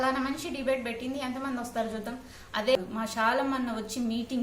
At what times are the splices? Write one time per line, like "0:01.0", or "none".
0:02.8